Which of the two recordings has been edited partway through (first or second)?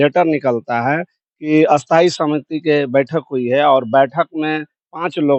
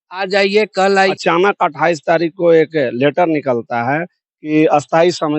second